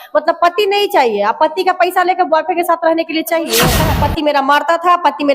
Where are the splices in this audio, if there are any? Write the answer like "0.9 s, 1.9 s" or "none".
3.8 s